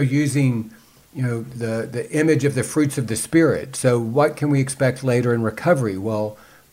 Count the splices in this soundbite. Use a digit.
0